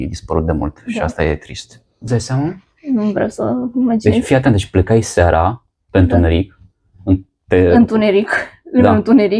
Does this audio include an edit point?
yes; 1 cut; at 2.1 s

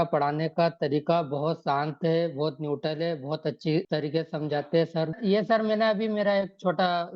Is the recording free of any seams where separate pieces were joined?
no; 2 cuts; at 3.9 s, 5.2 s

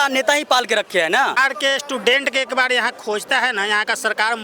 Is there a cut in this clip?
yes; 1 cut; at 1.4 s

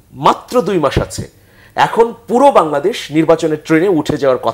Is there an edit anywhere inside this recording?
no; 0 cuts

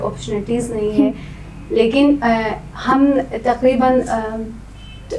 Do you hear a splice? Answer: no; 0 cuts

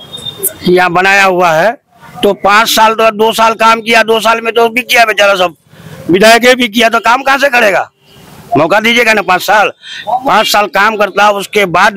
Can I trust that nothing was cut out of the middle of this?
yes; 0 cuts

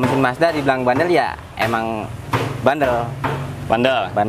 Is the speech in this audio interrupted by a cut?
no; 0 cuts

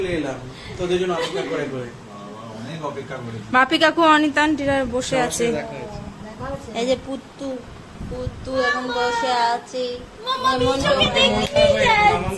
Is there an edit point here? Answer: no; 0 cuts

